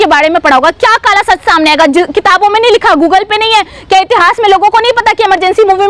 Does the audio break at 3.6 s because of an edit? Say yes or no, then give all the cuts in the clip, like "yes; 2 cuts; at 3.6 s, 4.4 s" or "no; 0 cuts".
no; 0 cuts